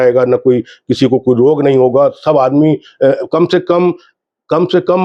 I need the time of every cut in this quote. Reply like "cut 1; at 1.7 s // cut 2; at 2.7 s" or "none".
none